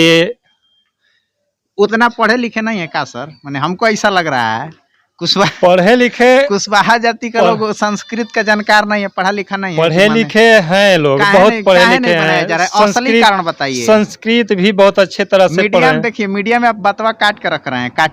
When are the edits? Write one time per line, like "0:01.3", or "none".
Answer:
none

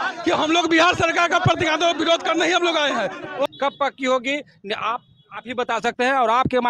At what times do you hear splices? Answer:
0:03.5

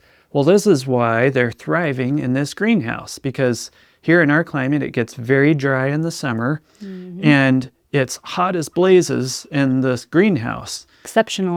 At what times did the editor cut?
none

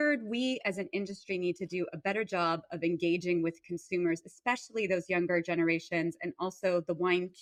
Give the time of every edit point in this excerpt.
none

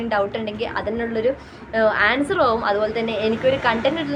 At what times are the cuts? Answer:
none

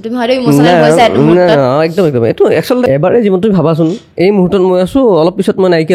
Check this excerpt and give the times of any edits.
0:02.8

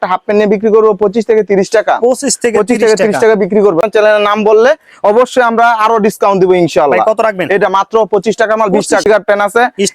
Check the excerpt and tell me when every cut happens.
0:03.8
0:09.0

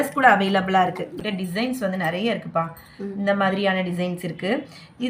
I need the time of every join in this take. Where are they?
0:01.2

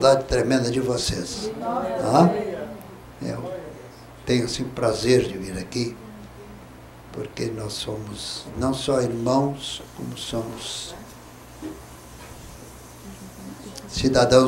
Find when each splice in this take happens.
none

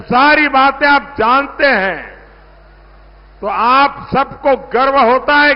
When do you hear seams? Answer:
none

